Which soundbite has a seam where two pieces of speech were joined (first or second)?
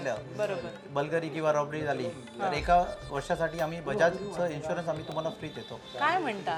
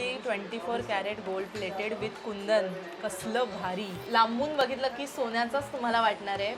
second